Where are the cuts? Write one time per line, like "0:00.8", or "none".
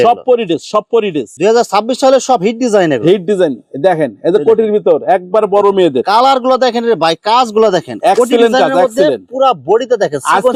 none